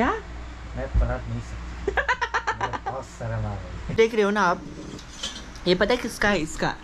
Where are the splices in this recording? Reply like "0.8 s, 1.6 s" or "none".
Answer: 3.9 s